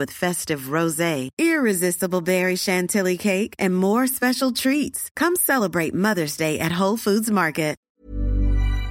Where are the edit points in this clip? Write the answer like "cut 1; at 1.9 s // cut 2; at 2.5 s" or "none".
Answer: cut 1; at 7.8 s

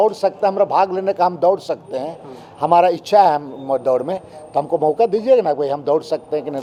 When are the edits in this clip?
none

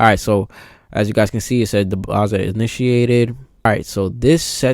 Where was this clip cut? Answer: cut 1; at 3.6 s

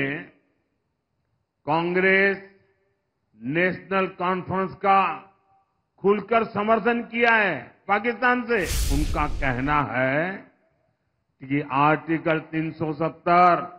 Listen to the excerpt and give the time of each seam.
cut 1; at 8.8 s

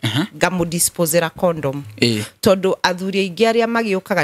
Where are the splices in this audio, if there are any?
none

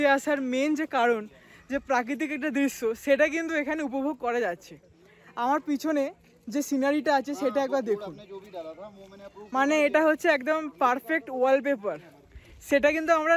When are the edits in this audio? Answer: none

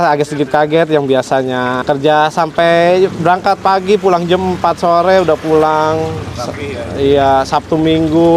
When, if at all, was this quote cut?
cut 1; at 1.8 s

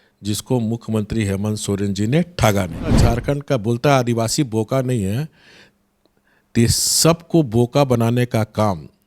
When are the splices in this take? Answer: cut 1; at 3.0 s

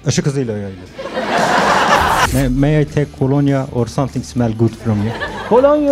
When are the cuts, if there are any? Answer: cut 1; at 2.3 s

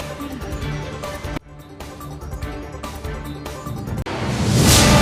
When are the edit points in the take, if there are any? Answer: none

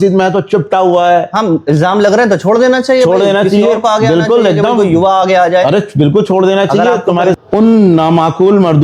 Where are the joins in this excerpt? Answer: cut 1; at 7.3 s

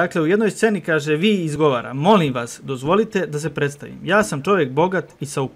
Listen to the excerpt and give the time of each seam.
cut 1; at 1.5 s

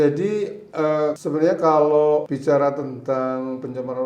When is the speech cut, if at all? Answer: cut 1; at 1.2 s // cut 2; at 2.3 s

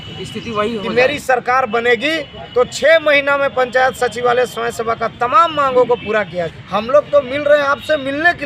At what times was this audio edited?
cut 1; at 0.8 s // cut 2; at 6.5 s

